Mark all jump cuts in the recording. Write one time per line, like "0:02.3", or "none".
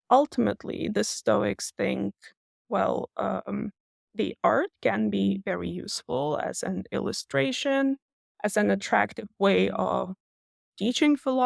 none